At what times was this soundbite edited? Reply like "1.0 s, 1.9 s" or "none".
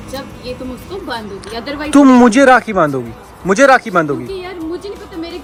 none